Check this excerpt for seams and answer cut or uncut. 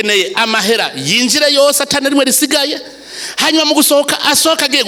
uncut